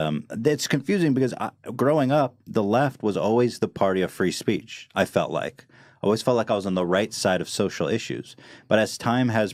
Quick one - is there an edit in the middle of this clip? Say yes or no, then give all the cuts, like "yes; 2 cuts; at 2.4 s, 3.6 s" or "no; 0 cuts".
no; 0 cuts